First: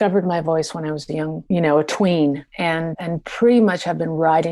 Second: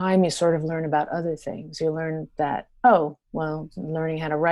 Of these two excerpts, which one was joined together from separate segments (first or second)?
first